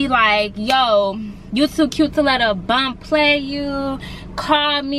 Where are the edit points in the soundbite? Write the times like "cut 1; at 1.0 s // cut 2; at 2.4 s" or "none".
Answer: none